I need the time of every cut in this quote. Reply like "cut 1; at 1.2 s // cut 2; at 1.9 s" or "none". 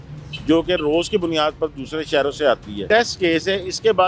cut 1; at 2.8 s